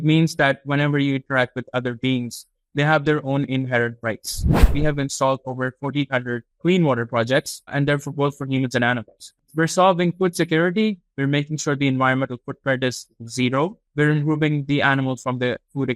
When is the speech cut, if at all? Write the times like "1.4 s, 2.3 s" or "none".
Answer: 4.7 s, 6.5 s, 7.7 s, 9.3 s, 13.8 s